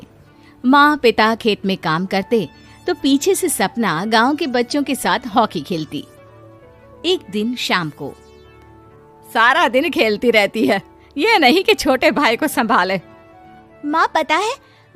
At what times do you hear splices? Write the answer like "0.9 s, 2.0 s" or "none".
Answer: none